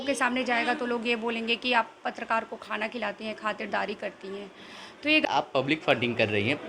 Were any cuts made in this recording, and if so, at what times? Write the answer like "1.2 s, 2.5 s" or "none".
5.2 s